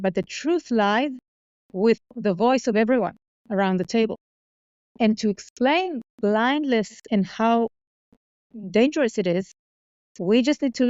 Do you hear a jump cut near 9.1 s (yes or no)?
no